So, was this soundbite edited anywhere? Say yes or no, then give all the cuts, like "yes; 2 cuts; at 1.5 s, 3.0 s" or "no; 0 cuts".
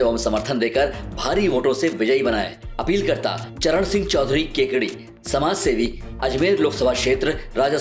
no; 0 cuts